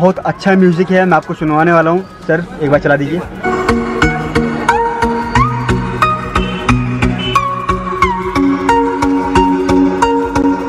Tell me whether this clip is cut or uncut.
uncut